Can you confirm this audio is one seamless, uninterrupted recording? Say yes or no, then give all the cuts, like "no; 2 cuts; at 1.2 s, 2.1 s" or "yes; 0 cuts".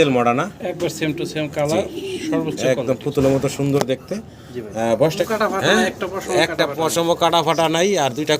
no; 1 cut; at 5.3 s